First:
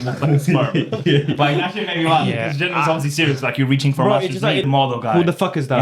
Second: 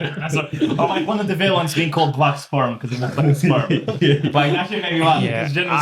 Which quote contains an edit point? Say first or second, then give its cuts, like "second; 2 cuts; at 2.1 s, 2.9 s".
first; 1 cut; at 4.7 s